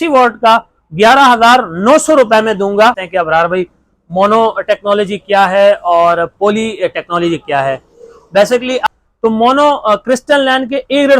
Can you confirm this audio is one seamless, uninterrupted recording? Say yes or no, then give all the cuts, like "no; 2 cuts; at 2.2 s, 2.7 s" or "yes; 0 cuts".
no; 2 cuts; at 3.0 s, 8.8 s